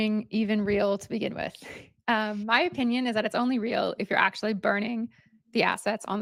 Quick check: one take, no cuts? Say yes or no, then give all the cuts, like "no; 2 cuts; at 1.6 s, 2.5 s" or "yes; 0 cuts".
yes; 0 cuts